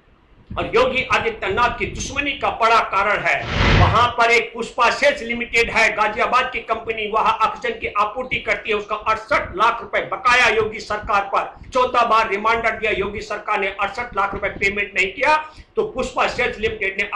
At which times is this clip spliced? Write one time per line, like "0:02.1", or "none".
0:03.6